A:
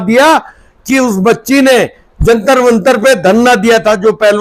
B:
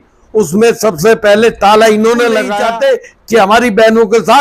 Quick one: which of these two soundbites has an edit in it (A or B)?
B